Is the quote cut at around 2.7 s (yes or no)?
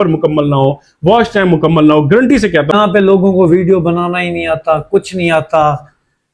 yes